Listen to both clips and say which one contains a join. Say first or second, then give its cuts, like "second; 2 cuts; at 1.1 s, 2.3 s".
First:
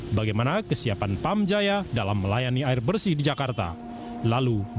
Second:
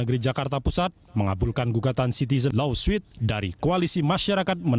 second; 1 cut; at 1.9 s